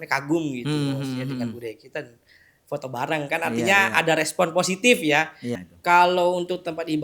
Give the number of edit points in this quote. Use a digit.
1